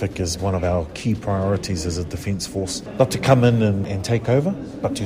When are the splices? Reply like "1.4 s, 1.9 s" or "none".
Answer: 2.8 s, 3.9 s